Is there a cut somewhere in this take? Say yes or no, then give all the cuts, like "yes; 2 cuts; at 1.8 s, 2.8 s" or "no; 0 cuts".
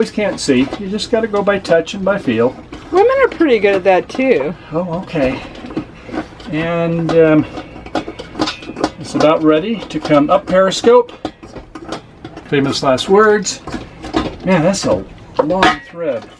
no; 0 cuts